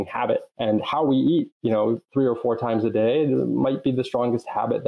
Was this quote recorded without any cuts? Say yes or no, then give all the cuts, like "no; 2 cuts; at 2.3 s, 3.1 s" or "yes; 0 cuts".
yes; 0 cuts